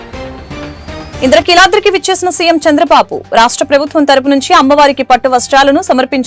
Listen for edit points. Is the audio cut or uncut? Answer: cut